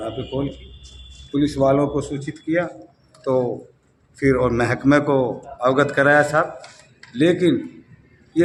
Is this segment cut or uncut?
uncut